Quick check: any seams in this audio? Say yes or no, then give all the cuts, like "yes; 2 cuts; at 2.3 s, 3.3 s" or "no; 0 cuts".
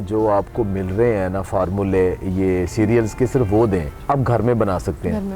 yes; 1 cut; at 3.9 s